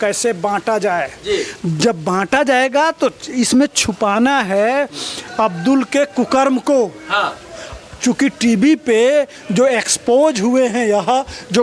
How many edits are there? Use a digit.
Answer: 0